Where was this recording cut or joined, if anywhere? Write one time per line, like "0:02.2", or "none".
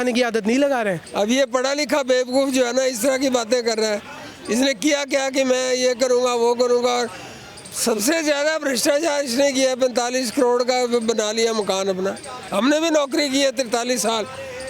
0:01.0
0:12.4